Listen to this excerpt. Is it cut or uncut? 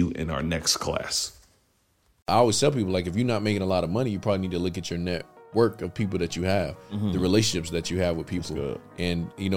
cut